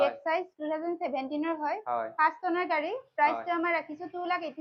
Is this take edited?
no; 0 cuts

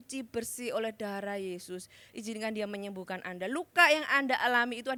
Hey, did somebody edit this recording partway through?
no; 0 cuts

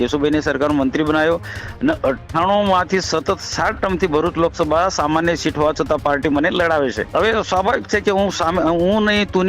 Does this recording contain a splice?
yes; 1 cut; at 7.1 s

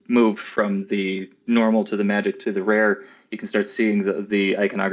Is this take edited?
no; 0 cuts

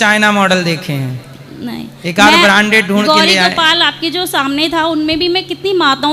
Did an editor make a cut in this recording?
no; 0 cuts

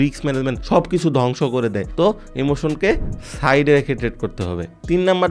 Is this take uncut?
yes; 0 cuts

